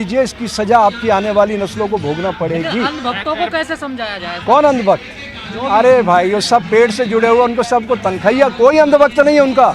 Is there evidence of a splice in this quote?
no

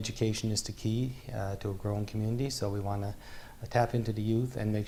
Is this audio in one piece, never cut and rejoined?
yes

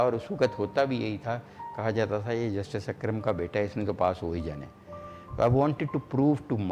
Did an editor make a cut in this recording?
no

